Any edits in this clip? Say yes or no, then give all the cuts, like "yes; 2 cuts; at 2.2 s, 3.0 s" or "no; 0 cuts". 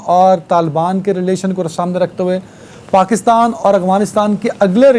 no; 0 cuts